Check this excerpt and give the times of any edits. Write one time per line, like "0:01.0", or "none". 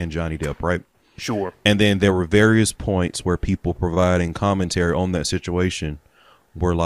none